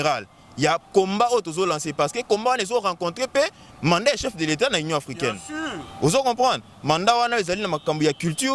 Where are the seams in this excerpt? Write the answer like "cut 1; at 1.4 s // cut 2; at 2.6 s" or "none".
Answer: none

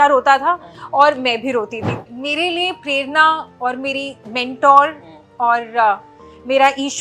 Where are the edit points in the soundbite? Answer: cut 1; at 1.9 s

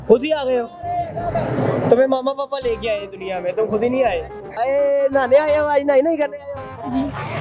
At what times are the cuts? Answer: cut 1; at 4.5 s

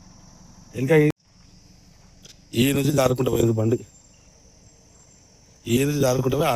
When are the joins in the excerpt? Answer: cut 1; at 1.1 s

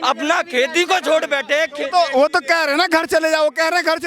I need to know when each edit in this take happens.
none

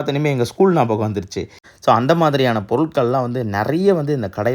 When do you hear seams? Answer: cut 1; at 1.7 s

